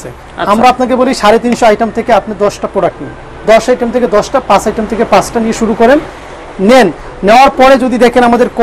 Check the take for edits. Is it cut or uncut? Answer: uncut